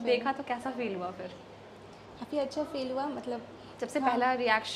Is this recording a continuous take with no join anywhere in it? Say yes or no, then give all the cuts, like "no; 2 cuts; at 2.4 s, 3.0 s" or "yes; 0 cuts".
yes; 0 cuts